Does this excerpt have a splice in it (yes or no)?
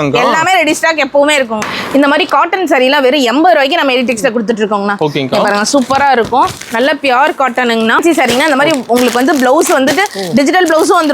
yes